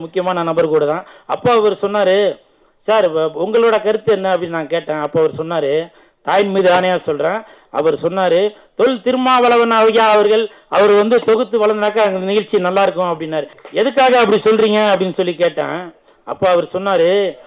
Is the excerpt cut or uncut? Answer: cut